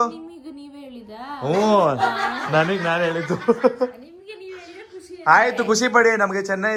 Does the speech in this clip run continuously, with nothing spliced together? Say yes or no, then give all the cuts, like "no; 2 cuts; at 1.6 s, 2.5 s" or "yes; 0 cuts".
yes; 0 cuts